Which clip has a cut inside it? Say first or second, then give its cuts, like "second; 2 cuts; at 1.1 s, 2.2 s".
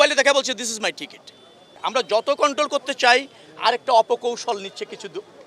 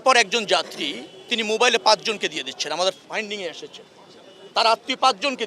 first; 1 cut; at 1.7 s